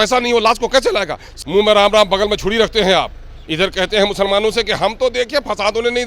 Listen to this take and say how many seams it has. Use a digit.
1